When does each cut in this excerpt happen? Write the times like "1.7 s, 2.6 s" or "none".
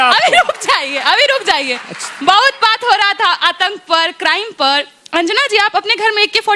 none